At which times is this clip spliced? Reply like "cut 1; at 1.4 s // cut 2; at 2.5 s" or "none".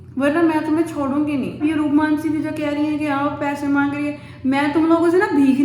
cut 1; at 1.6 s